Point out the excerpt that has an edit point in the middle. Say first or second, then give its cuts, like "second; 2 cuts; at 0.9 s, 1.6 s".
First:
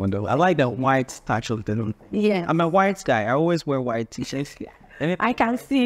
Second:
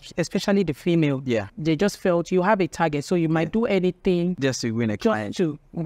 second; 2 cuts; at 1.5 s, 4.4 s